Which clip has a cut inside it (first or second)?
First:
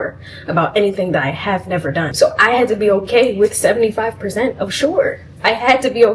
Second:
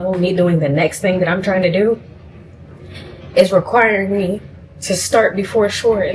first